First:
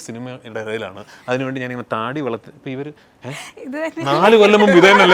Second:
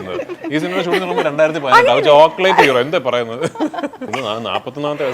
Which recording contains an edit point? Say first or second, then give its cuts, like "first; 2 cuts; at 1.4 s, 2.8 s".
second; 1 cut; at 4.1 s